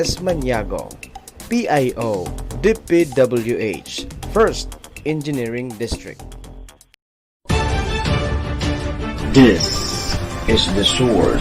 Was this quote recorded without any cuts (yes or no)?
no